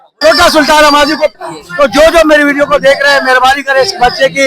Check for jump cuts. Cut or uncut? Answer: cut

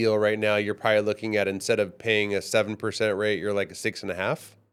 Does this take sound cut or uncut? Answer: uncut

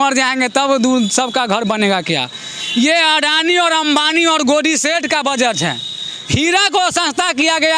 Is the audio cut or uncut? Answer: uncut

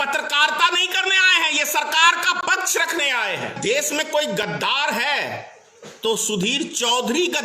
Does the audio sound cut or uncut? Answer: cut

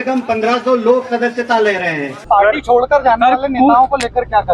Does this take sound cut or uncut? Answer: cut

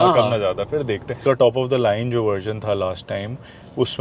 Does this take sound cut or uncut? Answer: cut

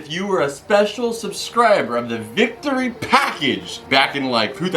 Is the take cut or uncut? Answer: cut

